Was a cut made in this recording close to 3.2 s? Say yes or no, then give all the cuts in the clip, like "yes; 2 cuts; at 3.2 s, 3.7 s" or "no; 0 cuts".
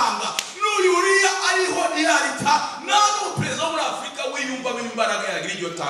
no; 0 cuts